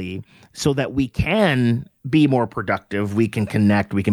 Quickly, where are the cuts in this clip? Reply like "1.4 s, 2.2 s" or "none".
1.9 s